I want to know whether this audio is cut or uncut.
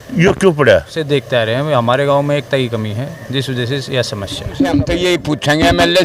cut